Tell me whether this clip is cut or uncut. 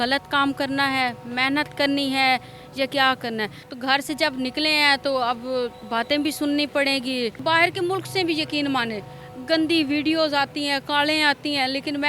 cut